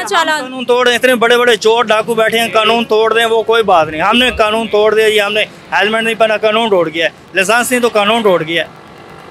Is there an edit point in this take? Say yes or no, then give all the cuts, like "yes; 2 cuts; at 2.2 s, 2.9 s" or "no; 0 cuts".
no; 0 cuts